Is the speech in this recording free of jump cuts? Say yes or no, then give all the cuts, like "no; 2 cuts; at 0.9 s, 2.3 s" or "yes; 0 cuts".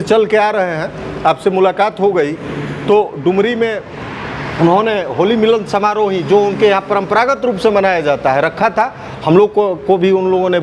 yes; 0 cuts